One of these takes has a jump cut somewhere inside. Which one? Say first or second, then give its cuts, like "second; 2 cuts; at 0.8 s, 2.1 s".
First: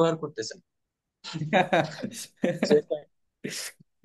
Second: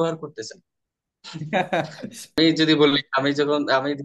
second; 1 cut; at 2.4 s